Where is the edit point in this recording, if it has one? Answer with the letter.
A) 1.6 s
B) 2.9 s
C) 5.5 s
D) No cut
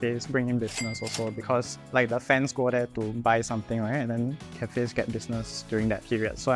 D